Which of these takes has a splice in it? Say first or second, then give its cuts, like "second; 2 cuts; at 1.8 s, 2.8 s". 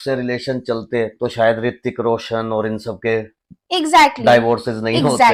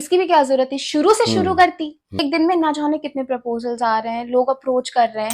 second; 1 cut; at 2.2 s